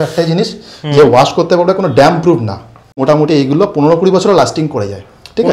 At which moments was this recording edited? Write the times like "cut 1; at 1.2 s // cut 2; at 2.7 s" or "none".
cut 1; at 3.0 s